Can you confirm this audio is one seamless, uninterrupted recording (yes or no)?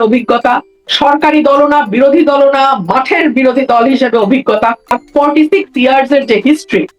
no